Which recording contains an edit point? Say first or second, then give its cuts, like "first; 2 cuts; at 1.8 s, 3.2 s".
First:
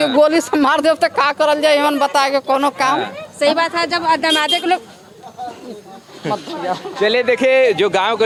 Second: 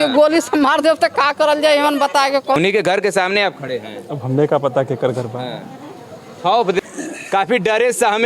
second; 2 cuts; at 2.6 s, 6.9 s